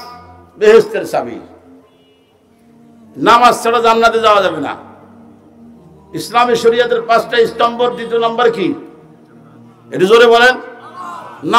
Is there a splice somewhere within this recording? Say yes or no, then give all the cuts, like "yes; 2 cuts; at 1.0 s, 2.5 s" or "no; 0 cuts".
no; 0 cuts